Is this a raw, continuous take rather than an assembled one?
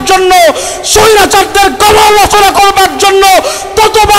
yes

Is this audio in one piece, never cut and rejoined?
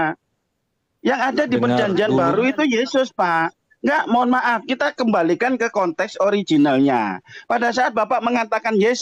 yes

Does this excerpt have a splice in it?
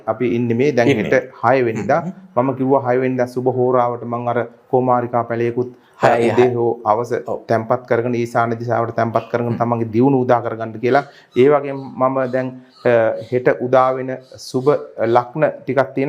no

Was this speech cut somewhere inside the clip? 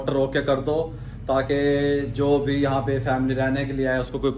no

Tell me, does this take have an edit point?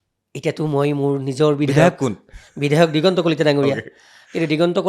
no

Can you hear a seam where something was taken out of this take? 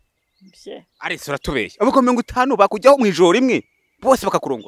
no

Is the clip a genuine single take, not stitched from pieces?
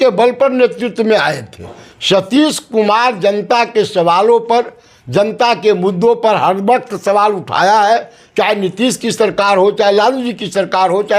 yes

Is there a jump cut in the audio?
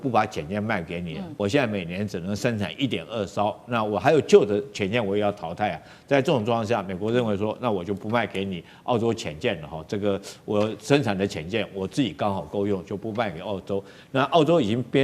yes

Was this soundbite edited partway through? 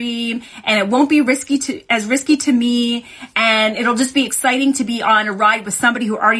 no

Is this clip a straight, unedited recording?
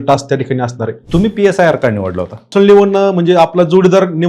no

